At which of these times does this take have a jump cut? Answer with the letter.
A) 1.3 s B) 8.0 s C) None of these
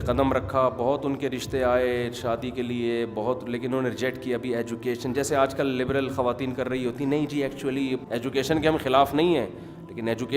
B